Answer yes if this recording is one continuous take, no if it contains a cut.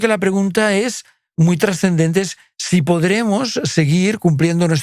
yes